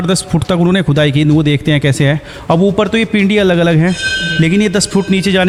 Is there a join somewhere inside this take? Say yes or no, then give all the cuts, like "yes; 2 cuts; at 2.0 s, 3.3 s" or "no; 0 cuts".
no; 0 cuts